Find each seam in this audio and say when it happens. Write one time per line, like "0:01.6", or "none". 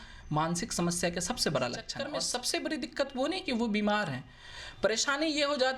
0:01.9